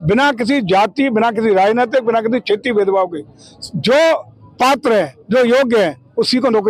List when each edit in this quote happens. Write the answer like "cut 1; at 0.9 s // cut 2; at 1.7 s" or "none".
none